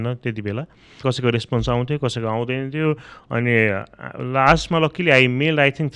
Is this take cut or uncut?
cut